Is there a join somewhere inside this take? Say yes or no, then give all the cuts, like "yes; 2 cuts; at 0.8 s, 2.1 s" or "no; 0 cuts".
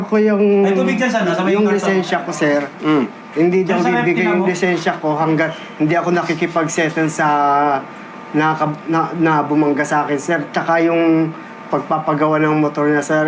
no; 0 cuts